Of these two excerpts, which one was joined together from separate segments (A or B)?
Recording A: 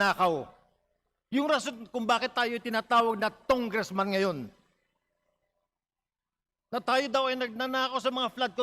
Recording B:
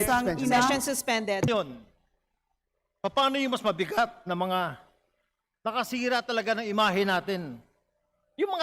B